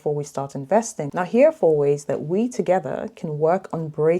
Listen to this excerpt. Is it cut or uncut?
cut